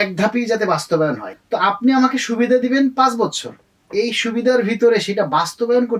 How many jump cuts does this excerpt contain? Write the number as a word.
one